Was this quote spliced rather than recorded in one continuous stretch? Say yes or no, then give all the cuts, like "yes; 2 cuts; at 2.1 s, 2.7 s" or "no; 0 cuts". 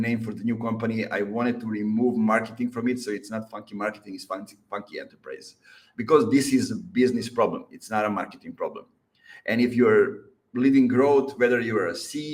no; 0 cuts